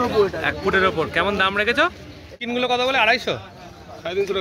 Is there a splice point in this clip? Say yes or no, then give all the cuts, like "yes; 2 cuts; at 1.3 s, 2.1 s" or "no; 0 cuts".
yes; 1 cut; at 2.4 s